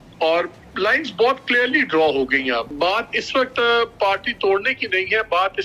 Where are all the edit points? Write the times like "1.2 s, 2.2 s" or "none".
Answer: 2.7 s